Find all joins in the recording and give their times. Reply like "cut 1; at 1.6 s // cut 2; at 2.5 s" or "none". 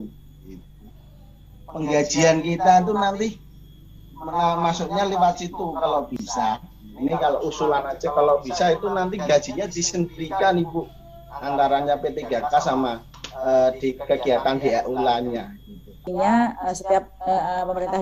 cut 1; at 16.0 s